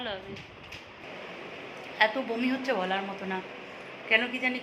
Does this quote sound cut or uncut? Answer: cut